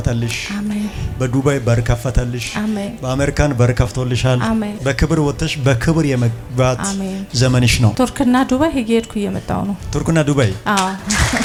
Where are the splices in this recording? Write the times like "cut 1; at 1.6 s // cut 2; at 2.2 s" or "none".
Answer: none